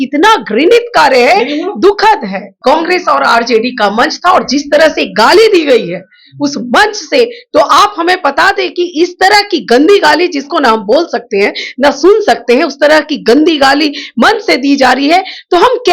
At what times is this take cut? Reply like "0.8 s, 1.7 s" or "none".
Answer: 2.5 s